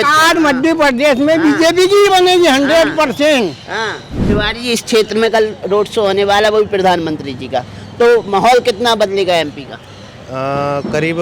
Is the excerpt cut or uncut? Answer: cut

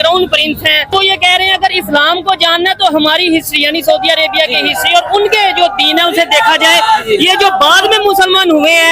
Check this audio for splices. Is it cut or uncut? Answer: cut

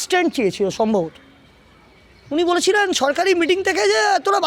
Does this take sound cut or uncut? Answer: uncut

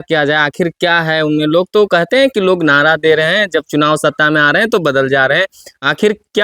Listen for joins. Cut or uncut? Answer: uncut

